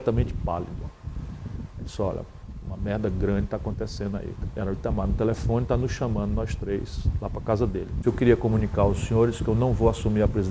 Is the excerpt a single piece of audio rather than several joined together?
no; 2 cuts; at 4.4 s, 8.0 s

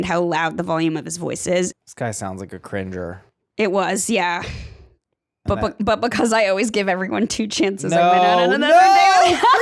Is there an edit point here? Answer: yes; 1 cut; at 1.7 s

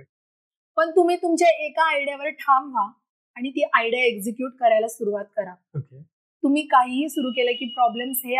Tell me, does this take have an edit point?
no; 0 cuts

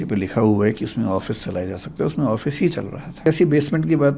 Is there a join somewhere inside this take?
yes; 1 cut; at 3.3 s

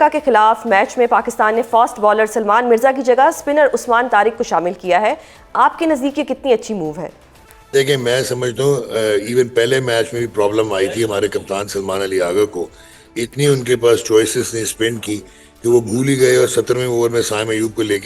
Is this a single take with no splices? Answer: yes; 0 cuts

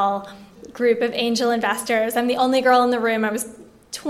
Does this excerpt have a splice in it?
no; 0 cuts

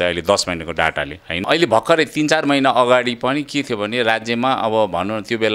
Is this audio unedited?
no; 1 cut; at 1.4 s

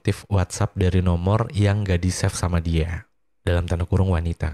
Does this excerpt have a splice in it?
no; 0 cuts

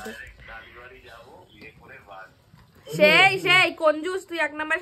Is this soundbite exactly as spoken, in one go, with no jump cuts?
yes; 0 cuts

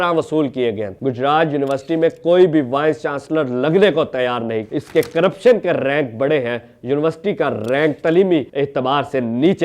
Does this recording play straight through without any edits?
no; 2 cuts; at 0.9 s, 4.7 s

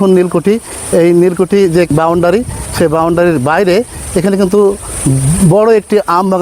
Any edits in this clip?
yes; 1 cut; at 1.9 s

